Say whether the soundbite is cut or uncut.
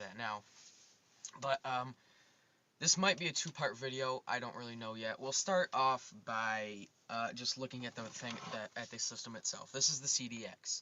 cut